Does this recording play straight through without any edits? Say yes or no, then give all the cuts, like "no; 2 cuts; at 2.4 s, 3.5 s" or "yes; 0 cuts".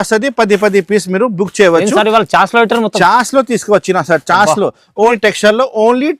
no; 1 cut; at 5.1 s